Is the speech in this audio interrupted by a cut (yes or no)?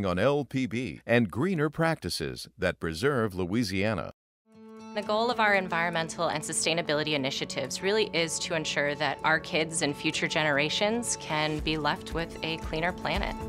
no